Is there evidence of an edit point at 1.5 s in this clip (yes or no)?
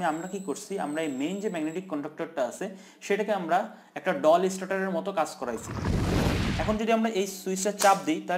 no